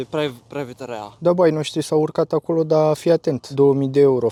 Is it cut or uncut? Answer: uncut